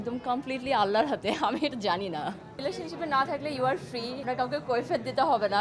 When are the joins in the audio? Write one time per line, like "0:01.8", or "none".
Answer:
0:02.6
0:04.2